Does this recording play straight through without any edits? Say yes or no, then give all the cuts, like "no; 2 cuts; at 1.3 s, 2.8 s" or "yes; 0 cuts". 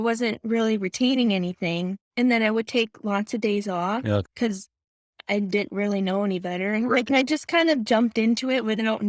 no; 2 cuts; at 2.0 s, 4.3 s